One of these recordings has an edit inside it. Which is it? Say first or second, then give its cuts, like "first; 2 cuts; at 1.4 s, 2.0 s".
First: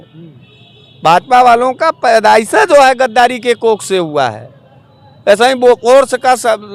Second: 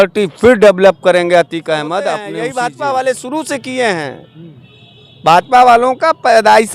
second; 1 cut; at 2.3 s